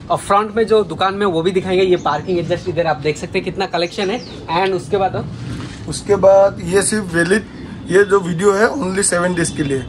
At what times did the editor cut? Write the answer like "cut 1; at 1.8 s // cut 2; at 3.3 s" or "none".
none